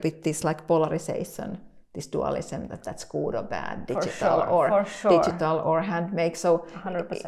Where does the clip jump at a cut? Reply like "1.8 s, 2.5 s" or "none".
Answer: none